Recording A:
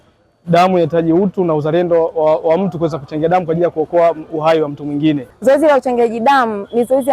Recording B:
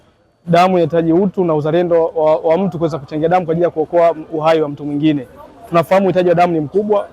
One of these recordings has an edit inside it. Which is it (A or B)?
A